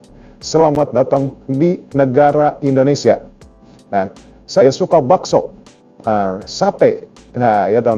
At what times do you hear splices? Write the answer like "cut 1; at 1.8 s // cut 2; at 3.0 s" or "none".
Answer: none